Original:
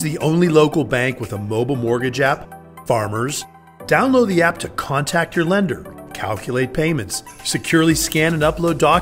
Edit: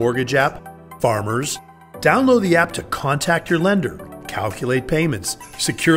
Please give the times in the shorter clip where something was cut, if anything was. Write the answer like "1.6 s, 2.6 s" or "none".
none